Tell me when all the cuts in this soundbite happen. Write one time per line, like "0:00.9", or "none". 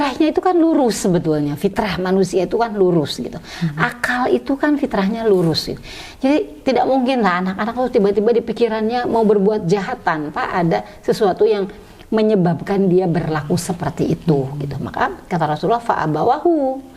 none